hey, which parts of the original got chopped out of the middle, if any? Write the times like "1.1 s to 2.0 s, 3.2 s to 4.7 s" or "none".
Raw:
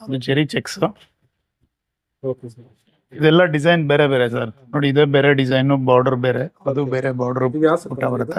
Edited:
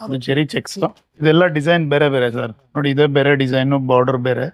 1.0 s to 3.0 s